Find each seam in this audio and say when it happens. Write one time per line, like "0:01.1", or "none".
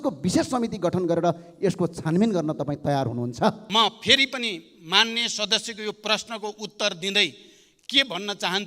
0:03.6